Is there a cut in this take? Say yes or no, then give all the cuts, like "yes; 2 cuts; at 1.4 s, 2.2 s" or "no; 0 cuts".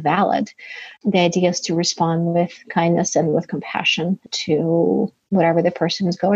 no; 0 cuts